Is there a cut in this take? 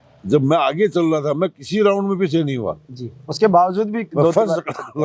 no; 0 cuts

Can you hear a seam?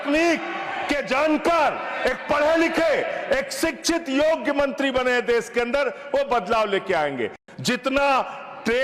yes; 1 cut; at 7.4 s

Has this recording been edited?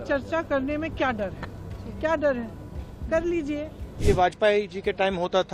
yes; 1 cut; at 3.8 s

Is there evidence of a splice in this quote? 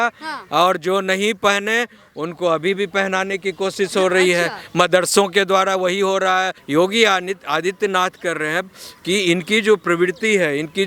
yes; 1 cut; at 6.6 s

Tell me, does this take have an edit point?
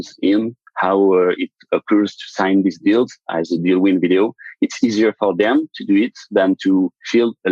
no; 0 cuts

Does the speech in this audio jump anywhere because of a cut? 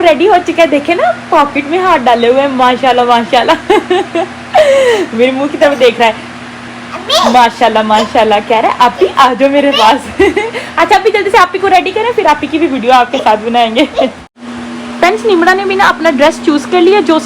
no; 0 cuts

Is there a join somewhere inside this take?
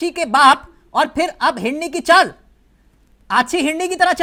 no; 0 cuts

